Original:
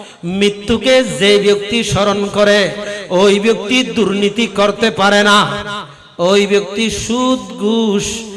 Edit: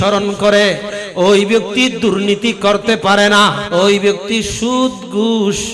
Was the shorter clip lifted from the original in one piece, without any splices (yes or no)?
no